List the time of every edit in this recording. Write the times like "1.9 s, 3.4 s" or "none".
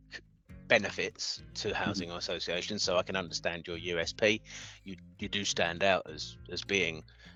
none